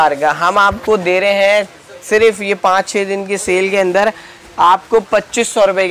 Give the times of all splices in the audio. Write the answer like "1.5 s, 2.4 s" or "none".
none

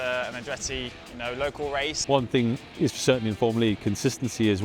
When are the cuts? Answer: 2.0 s

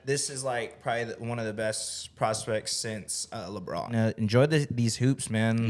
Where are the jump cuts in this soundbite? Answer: 3.9 s

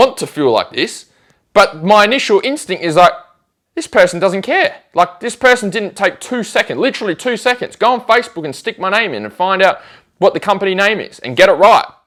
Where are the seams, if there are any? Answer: none

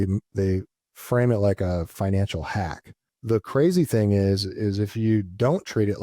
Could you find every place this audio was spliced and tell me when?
3.1 s

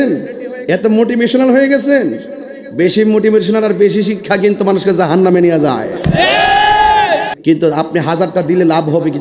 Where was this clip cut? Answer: 7.3 s

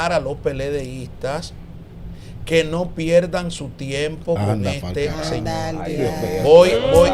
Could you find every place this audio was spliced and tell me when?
none

